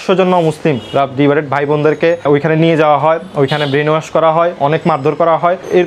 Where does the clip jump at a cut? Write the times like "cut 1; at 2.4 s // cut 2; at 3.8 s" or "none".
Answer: cut 1; at 2.2 s